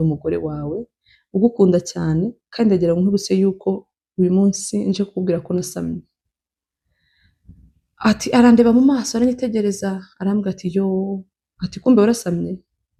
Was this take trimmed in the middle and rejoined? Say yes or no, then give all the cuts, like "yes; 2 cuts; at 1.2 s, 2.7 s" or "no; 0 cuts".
no; 0 cuts